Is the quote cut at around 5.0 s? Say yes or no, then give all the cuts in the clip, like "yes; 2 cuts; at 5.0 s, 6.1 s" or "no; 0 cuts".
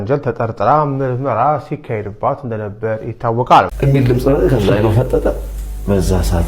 no; 1 cut; at 3.7 s